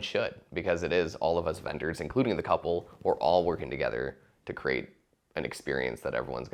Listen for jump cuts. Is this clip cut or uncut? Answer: uncut